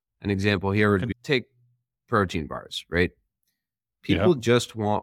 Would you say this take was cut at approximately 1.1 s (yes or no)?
yes